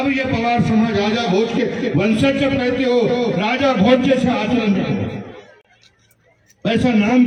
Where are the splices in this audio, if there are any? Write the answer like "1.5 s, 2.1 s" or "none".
none